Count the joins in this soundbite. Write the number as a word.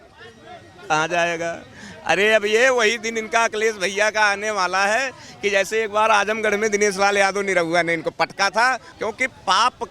one